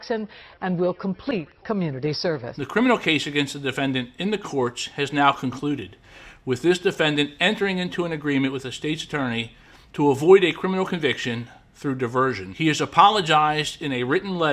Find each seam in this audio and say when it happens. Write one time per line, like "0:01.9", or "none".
0:02.5
0:12.5